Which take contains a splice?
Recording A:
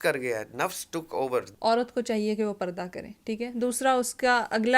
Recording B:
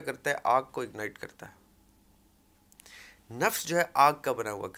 A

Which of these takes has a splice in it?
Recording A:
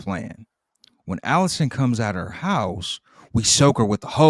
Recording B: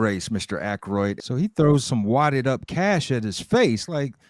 B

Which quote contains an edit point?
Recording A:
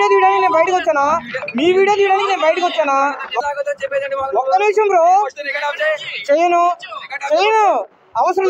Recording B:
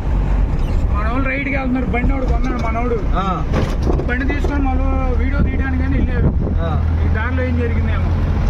A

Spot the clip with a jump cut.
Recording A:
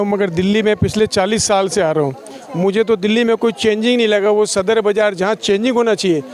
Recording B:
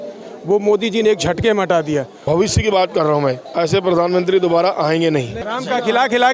B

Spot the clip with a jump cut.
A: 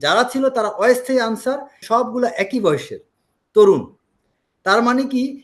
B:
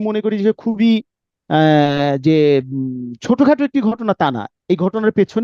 A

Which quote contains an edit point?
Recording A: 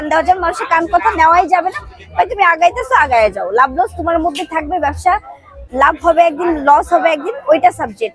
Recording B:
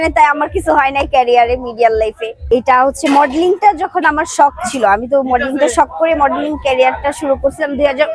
B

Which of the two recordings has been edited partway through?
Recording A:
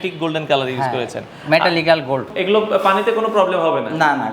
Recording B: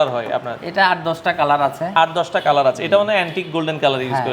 A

